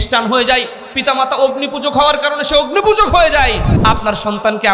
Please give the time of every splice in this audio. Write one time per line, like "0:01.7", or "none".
0:03.7

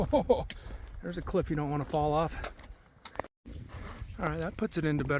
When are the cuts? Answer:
0:03.3

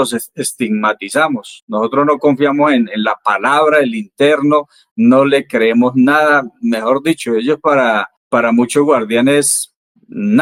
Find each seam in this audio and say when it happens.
none

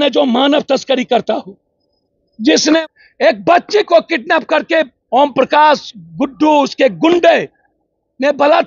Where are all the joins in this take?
0:02.8

